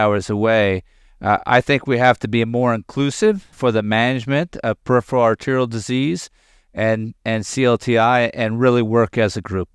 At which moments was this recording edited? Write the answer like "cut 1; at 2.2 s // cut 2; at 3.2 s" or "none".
cut 1; at 3.5 s